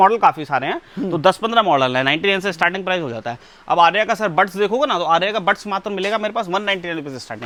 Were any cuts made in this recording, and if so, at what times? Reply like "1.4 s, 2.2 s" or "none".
none